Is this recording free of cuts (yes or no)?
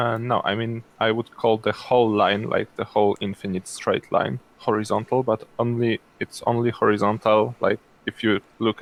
yes